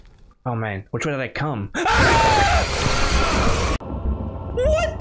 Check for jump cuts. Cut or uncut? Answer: cut